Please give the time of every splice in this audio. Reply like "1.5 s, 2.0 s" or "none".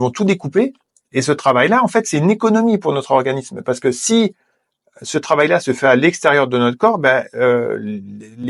none